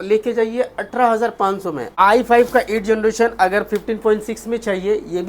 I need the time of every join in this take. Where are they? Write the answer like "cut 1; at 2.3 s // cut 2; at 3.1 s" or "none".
cut 1; at 1.8 s